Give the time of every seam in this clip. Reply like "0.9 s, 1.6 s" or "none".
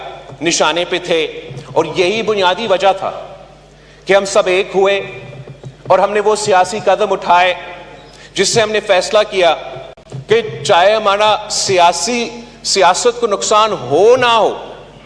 none

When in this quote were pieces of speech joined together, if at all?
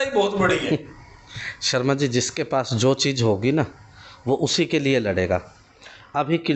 none

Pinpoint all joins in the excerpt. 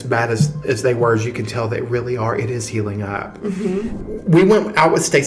4.0 s

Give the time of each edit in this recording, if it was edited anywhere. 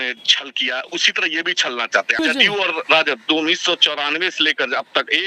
2.2 s

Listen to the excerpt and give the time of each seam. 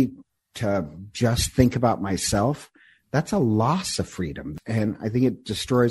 4.5 s

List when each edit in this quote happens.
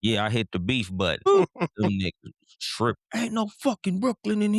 1.3 s

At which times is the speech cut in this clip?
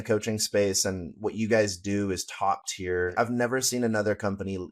3.1 s

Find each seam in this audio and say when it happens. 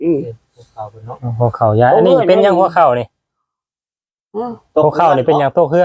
none

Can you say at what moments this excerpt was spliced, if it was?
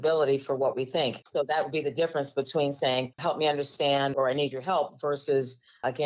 3.2 s

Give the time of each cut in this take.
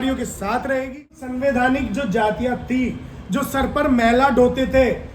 1.3 s

